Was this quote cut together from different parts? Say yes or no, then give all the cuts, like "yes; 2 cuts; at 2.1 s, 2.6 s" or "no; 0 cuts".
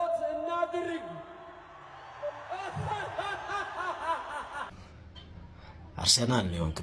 no; 0 cuts